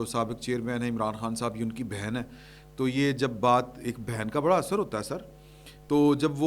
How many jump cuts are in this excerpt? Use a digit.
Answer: 0